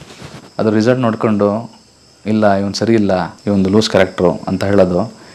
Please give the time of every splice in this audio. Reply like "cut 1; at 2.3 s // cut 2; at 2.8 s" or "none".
cut 1; at 3.3 s